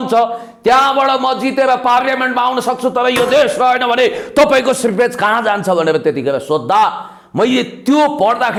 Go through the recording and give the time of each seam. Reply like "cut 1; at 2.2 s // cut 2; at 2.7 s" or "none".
none